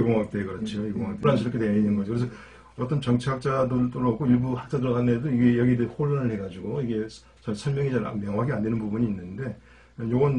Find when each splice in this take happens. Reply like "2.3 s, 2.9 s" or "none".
1.2 s